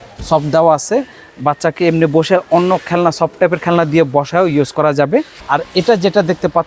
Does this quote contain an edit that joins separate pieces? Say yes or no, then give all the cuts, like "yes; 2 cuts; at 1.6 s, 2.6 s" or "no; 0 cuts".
yes; 1 cut; at 5.4 s